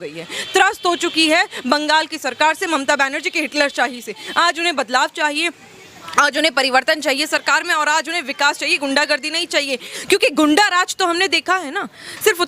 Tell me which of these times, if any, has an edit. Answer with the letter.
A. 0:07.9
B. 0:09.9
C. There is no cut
B